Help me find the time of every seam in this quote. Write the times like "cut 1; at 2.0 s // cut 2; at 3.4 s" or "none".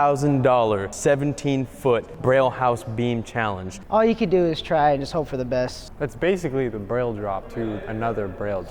cut 1; at 0.9 s // cut 2; at 2.1 s // cut 3; at 3.7 s // cut 4; at 5.8 s // cut 5; at 7.6 s